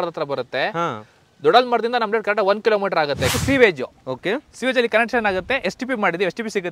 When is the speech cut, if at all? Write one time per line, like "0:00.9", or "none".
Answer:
0:03.3